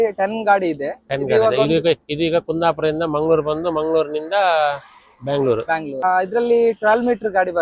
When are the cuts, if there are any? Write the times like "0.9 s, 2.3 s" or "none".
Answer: 6.0 s